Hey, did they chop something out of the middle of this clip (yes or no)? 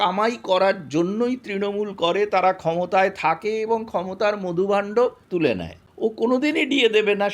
yes